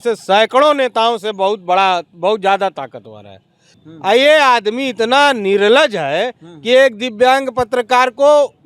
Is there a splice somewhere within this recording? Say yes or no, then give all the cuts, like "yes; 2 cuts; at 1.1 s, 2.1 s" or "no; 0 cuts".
yes; 1 cut; at 3.7 s